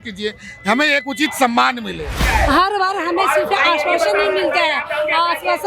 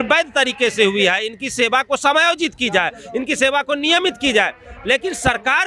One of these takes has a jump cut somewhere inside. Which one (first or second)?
first